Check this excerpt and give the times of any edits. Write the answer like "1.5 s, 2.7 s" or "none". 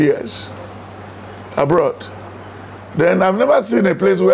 none